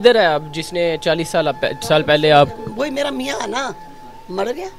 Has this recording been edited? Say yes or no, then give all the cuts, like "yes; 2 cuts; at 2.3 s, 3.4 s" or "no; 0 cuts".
no; 0 cuts